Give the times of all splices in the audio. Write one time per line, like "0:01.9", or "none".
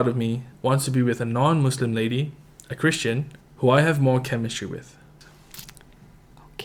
0:05.1